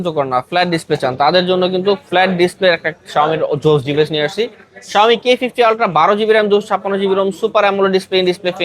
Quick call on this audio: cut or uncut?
uncut